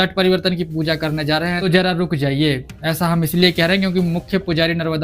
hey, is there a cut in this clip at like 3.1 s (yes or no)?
no